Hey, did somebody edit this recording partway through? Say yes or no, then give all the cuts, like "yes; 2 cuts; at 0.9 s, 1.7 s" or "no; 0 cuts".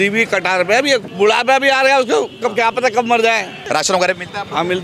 yes; 2 cuts; at 1.1 s, 3.6 s